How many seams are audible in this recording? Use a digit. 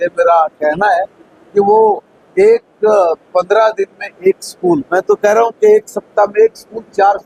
0